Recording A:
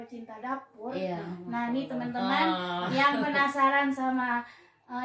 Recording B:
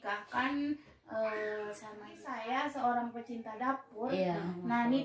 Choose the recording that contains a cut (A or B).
B